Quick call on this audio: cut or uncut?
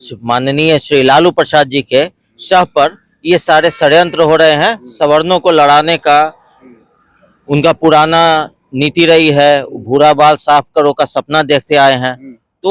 uncut